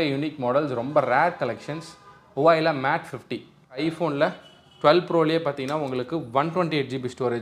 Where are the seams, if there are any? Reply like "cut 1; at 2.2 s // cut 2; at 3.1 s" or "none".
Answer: cut 1; at 3.8 s